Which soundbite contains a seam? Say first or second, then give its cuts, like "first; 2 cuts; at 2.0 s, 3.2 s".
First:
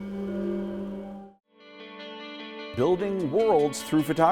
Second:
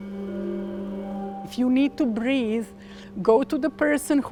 first; 1 cut; at 1.1 s